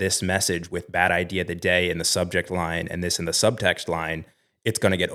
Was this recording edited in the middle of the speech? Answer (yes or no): no